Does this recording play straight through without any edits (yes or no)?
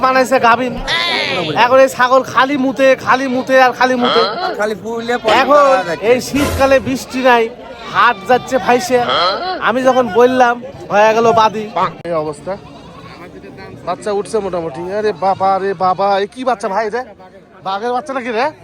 no